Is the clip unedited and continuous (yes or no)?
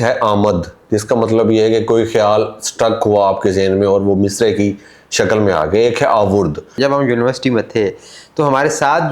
no